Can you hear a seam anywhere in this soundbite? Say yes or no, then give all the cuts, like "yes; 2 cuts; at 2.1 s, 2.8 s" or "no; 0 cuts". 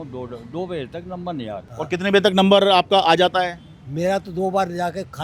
yes; 1 cut; at 1.7 s